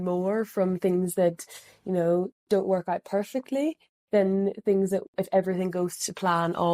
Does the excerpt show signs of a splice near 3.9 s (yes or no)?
no